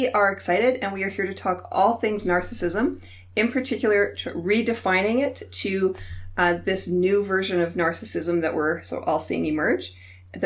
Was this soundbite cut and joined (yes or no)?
no